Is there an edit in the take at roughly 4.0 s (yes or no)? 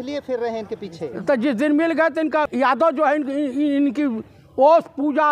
no